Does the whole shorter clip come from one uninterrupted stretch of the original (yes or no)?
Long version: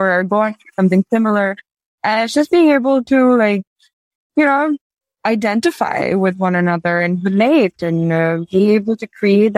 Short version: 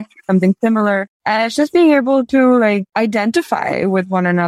no